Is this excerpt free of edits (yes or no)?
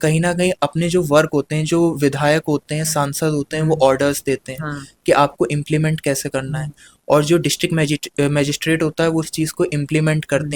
yes